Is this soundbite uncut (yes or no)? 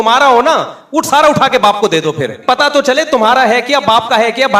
no